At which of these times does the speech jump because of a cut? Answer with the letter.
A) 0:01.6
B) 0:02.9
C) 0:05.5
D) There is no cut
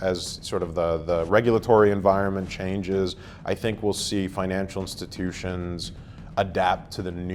D